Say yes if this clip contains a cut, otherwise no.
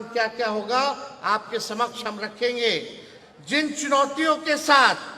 no